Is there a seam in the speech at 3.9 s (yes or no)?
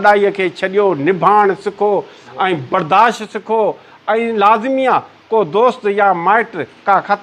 no